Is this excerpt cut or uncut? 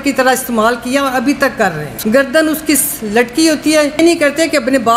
cut